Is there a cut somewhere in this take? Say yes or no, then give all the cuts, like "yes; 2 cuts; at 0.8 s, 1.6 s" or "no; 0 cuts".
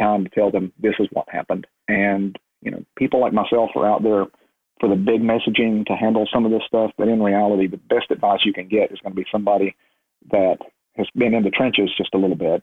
yes; 1 cut; at 1.7 s